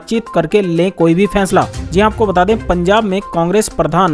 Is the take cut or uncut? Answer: uncut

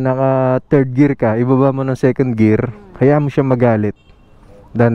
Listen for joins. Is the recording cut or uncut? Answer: uncut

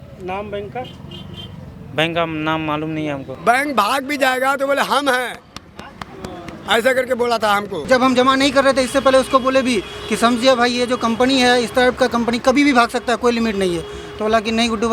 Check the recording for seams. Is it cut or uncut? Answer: cut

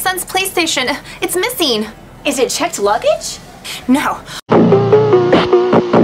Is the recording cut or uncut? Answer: cut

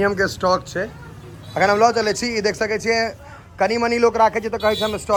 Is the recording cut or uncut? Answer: uncut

